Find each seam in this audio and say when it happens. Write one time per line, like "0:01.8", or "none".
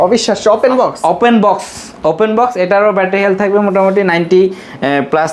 none